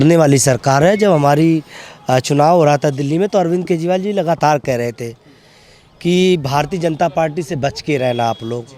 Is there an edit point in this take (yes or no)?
no